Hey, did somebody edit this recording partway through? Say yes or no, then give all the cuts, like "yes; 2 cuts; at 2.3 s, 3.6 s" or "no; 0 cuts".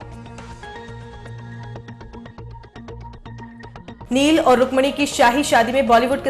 no; 0 cuts